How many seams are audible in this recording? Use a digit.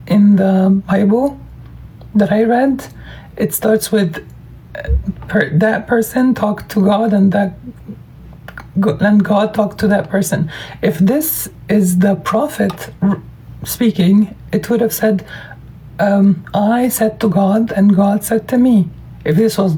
0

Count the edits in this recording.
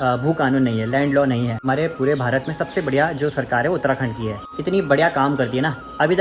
2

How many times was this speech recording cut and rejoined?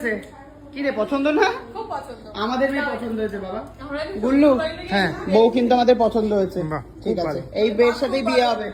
0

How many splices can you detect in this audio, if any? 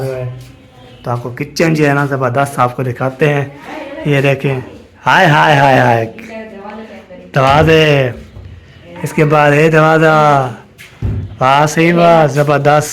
0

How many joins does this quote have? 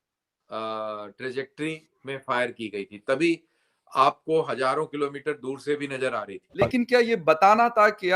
1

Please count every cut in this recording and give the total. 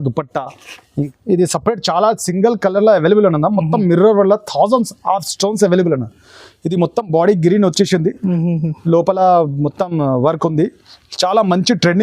1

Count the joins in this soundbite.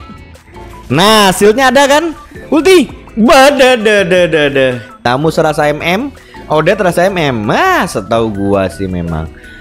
1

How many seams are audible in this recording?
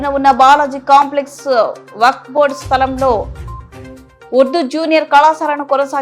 0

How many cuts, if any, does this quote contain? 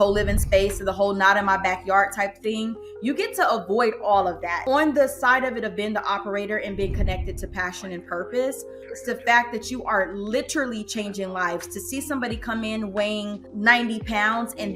3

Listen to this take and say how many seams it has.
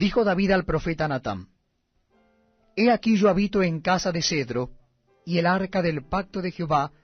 1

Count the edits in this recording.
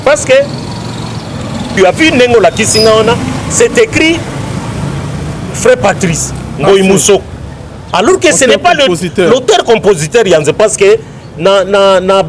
1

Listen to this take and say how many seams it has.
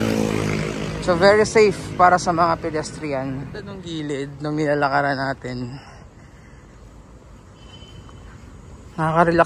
1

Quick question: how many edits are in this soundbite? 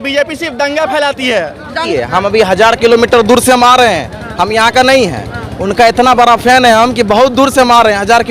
1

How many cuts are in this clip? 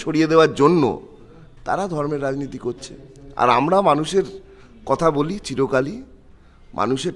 0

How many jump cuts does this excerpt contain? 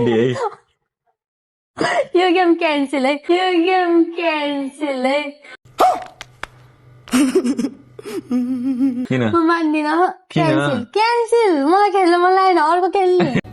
1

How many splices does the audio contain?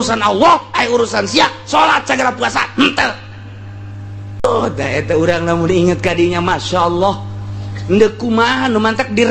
1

